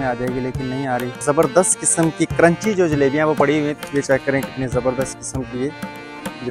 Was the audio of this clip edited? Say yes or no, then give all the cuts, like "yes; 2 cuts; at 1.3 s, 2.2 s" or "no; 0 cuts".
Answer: yes; 2 cuts; at 1.2 s, 3.8 s